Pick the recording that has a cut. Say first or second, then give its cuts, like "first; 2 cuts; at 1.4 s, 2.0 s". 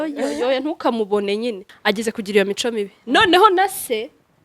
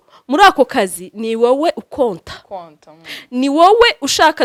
first; 1 cut; at 1.7 s